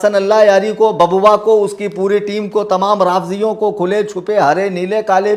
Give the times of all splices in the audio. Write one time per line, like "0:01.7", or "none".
none